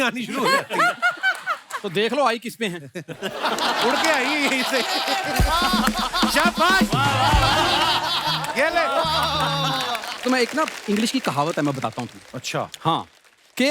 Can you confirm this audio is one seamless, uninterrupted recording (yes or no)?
no